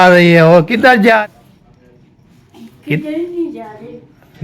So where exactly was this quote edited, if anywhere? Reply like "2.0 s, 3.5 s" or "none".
1.2 s